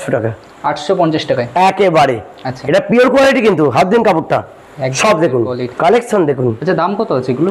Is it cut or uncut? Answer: cut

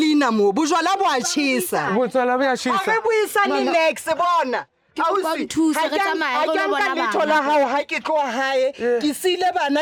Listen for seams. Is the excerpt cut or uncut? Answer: uncut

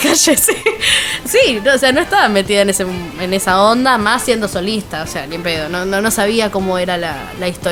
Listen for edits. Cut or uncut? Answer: uncut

